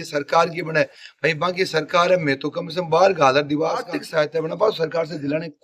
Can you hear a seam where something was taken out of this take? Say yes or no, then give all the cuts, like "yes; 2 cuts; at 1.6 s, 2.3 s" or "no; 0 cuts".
yes; 1 cut; at 4.0 s